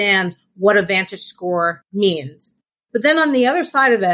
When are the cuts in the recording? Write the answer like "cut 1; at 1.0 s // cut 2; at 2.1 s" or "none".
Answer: cut 1; at 2.8 s